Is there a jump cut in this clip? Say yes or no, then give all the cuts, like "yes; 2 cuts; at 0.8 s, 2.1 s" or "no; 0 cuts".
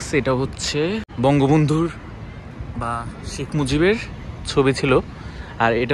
yes; 1 cut; at 1.1 s